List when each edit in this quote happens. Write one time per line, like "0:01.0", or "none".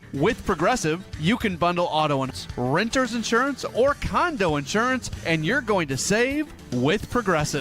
0:02.3